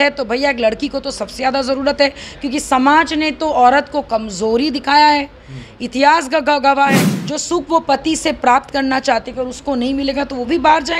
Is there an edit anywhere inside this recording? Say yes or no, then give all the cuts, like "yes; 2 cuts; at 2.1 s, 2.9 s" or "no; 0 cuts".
yes; 1 cut; at 7.1 s